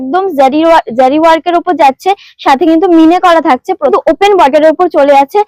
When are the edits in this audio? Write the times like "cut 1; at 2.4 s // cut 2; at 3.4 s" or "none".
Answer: cut 1; at 3.9 s